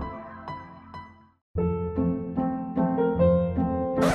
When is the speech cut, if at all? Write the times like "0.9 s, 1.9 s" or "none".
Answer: 1.4 s